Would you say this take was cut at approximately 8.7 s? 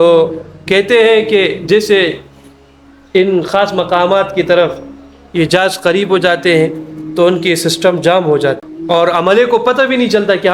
yes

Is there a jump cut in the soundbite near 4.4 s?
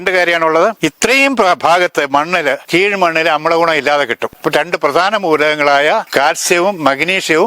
yes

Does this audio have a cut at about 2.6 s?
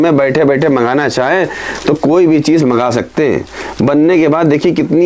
no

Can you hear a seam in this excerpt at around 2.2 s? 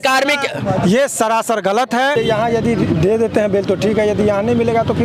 yes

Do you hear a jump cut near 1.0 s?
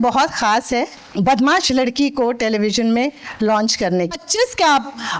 yes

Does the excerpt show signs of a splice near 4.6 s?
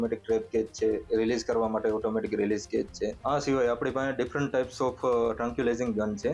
no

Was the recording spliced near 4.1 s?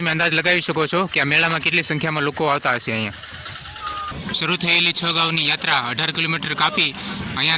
yes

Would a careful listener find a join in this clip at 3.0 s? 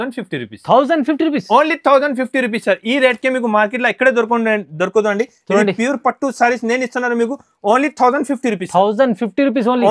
no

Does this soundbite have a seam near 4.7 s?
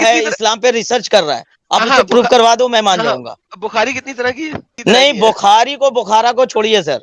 yes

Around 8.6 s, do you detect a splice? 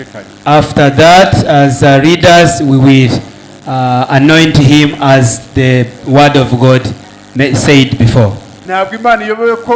yes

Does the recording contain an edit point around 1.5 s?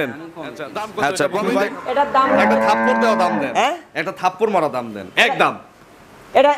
yes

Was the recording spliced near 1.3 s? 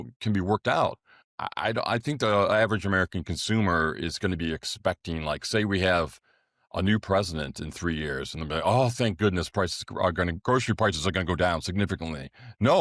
yes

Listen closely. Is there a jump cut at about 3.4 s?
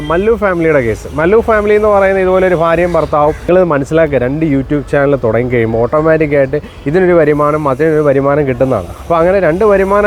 yes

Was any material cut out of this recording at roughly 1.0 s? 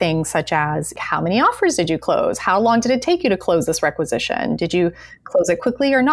yes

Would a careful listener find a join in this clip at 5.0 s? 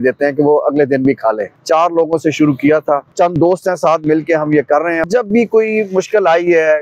yes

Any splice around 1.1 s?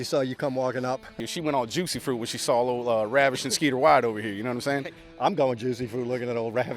yes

